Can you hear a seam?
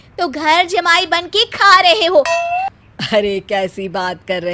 yes; 1 cut; at 2.7 s

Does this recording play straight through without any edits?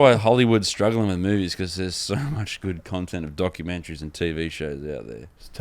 yes; 0 cuts

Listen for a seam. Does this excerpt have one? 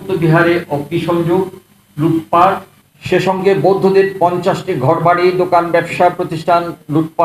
no; 0 cuts

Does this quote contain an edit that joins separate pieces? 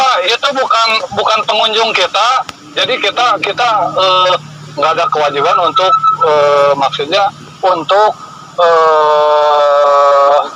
no; 0 cuts

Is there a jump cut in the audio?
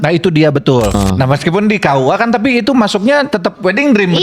yes; 1 cut; at 1.0 s

